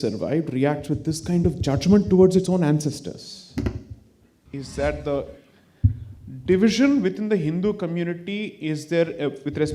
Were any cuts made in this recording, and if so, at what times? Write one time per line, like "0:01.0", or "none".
0:04.5

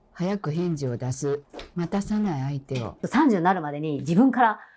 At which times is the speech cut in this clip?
0:01.6
0:02.9

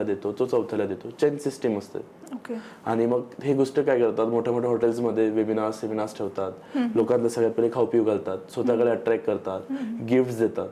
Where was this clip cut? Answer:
none

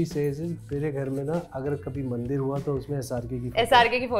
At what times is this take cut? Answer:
none

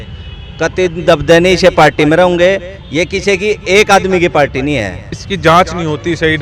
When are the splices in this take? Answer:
0:05.1

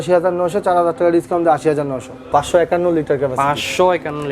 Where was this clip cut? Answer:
0:02.3

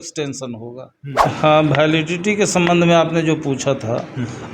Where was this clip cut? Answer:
0:01.2

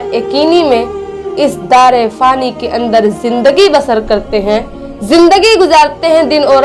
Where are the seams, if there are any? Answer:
none

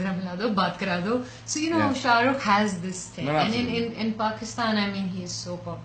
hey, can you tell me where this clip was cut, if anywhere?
none

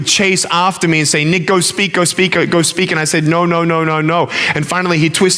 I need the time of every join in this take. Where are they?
none

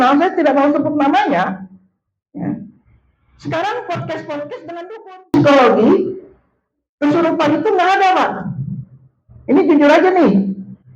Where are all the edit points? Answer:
0:05.3

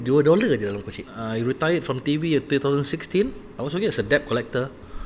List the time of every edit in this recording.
0:01.2
0:03.5

